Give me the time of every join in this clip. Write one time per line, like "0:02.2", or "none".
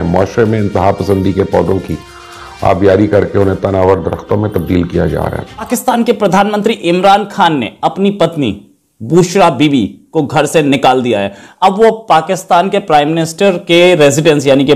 0:05.7